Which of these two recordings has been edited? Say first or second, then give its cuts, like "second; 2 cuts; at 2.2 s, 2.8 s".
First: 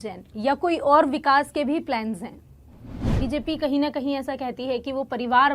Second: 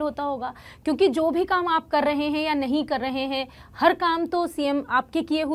first; 1 cut; at 3.1 s